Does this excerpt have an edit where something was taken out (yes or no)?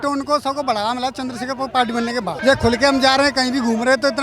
yes